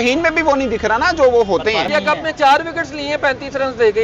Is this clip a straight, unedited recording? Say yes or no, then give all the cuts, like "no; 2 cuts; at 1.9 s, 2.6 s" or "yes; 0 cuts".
no; 1 cut; at 1.9 s